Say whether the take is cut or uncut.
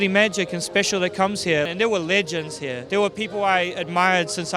cut